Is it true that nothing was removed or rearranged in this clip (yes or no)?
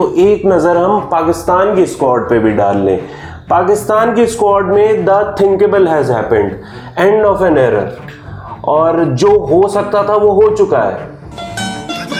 yes